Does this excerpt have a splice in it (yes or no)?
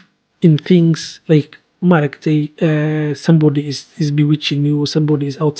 no